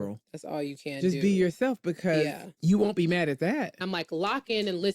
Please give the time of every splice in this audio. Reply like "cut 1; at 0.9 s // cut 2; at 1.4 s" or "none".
cut 1; at 2.5 s // cut 2; at 3.8 s